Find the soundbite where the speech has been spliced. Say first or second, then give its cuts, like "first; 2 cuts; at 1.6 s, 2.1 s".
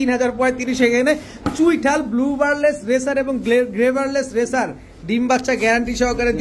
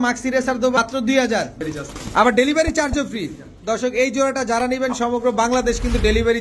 second; 2 cuts; at 0.8 s, 1.7 s